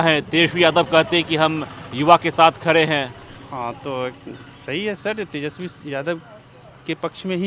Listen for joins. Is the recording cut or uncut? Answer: uncut